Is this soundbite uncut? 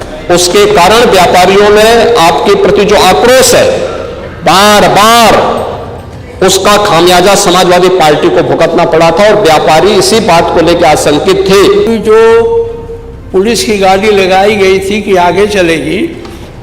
no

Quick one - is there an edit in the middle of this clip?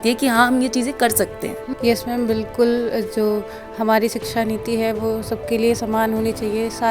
yes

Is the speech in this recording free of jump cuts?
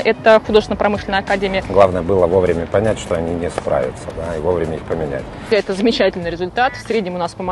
no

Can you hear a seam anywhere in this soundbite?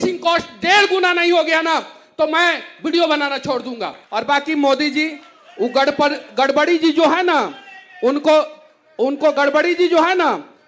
yes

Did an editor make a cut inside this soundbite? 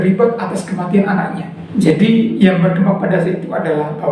yes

